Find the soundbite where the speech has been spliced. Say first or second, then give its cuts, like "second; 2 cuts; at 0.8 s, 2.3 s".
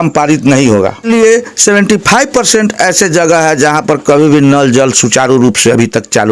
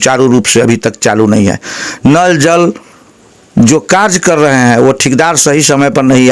first; 1 cut; at 1.0 s